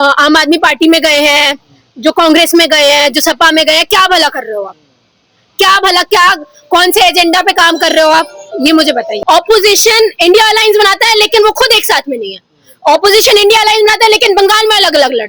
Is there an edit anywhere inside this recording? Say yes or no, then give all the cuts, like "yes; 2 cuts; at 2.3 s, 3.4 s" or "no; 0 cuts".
yes; 1 cut; at 9.1 s